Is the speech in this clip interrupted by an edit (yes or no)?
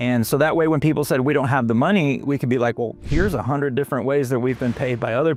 no